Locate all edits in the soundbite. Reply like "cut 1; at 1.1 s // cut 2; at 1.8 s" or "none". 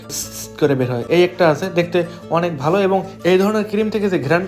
none